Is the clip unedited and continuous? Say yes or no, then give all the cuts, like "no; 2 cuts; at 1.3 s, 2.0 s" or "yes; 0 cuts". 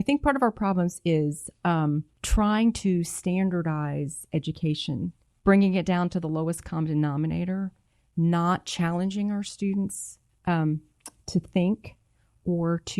no; 2 cuts; at 2.2 s, 5.2 s